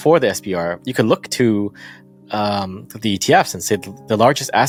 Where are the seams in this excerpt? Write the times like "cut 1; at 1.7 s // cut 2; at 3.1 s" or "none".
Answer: none